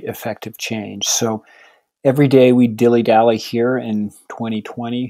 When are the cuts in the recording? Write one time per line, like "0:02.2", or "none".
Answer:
none